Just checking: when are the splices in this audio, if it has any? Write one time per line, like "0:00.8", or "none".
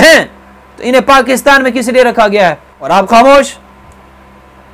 0:02.7